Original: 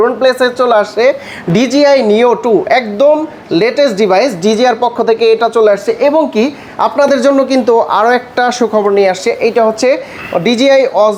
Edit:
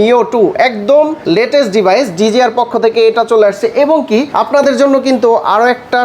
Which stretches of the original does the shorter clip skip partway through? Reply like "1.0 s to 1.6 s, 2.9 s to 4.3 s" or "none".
3.3 s to 3.4 s, 6.6 s to 6.8 s